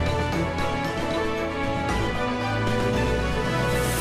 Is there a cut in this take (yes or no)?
no